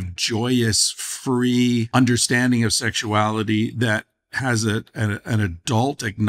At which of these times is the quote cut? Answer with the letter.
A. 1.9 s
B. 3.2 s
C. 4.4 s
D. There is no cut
A